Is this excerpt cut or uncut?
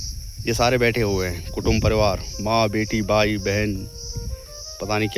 uncut